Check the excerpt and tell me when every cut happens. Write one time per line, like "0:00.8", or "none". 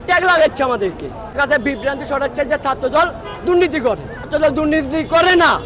0:01.3
0:04.3